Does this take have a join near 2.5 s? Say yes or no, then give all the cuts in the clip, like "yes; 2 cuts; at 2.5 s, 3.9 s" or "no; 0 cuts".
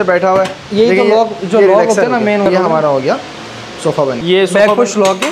yes; 2 cuts; at 2.5 s, 4.2 s